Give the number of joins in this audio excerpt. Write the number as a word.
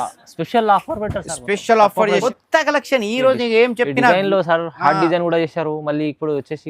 one